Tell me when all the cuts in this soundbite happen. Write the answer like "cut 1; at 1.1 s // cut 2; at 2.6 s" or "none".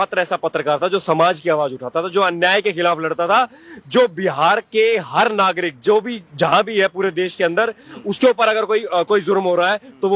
none